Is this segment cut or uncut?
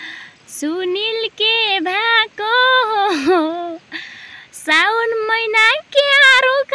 uncut